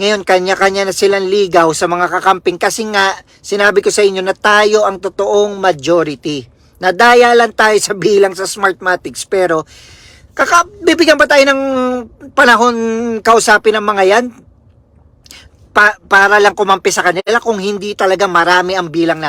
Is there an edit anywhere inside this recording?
no; 0 cuts

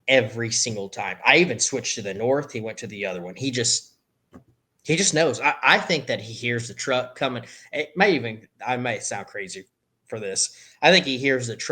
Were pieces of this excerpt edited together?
no; 0 cuts

